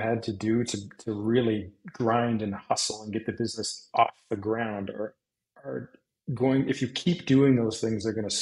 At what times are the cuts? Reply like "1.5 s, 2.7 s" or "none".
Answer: none